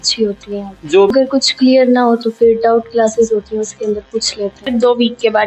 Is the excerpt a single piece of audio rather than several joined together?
no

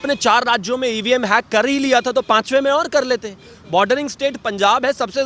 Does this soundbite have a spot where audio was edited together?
no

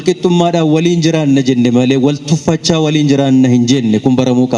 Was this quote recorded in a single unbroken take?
yes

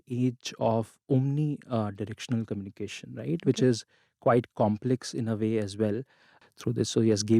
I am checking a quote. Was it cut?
yes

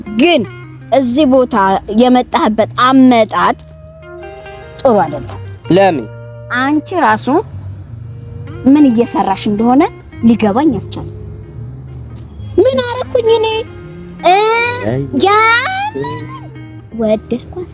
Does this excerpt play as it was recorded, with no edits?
yes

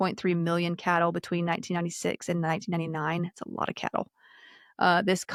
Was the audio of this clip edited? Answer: no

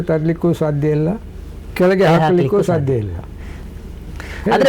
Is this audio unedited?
no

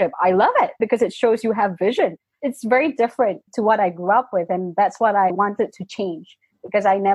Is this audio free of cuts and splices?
yes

